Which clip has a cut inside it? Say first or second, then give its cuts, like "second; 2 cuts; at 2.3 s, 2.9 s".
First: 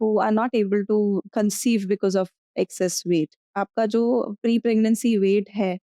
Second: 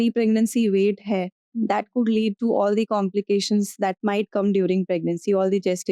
first; 2 cuts; at 1.2 s, 3.4 s